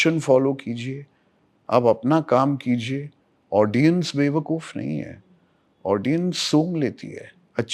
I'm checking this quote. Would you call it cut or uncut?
uncut